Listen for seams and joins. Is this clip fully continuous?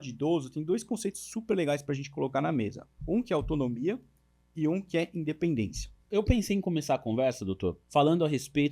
no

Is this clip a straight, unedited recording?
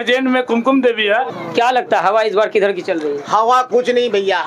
no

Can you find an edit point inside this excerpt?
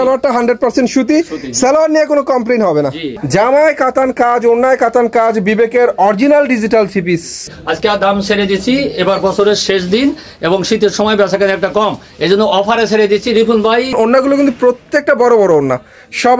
yes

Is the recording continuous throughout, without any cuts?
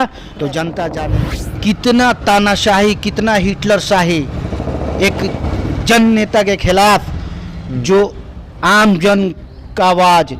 no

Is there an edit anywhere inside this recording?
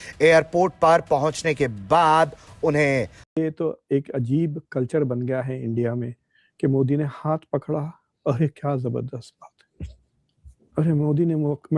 yes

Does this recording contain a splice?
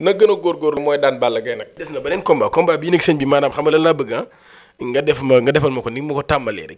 yes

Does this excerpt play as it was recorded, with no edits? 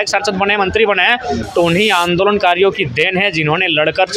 yes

